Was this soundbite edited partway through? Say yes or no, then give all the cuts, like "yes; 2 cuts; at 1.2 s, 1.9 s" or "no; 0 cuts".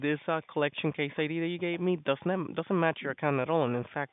no; 0 cuts